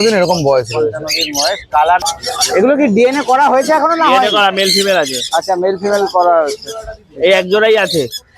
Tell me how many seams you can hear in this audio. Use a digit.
1